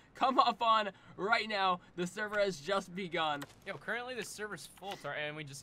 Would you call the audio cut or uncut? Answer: cut